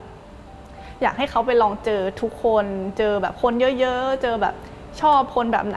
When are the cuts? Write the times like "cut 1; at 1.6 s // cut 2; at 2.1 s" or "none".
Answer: none